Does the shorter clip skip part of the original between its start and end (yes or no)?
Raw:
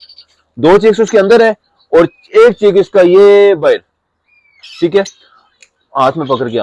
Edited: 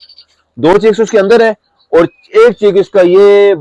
no